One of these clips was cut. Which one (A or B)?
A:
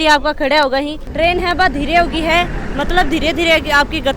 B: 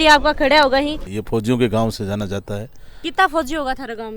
B